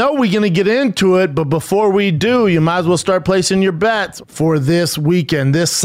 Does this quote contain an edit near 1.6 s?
no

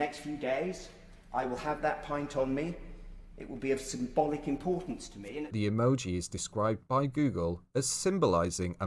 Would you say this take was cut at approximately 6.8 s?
no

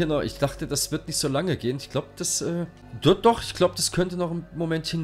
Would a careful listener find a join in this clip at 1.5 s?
no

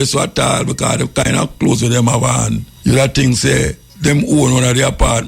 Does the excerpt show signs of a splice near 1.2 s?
no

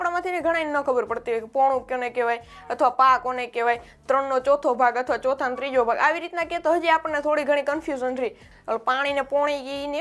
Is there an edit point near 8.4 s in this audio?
yes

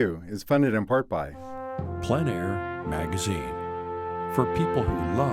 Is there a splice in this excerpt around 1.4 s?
yes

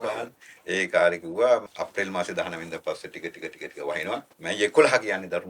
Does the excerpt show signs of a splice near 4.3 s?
yes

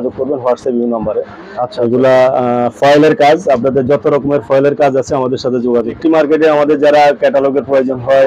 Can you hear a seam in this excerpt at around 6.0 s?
yes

